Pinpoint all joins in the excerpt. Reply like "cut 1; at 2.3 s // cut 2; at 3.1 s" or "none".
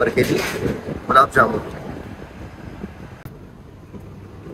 cut 1; at 3.1 s